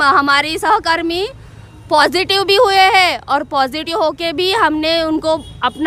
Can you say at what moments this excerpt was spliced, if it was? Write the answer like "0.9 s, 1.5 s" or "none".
none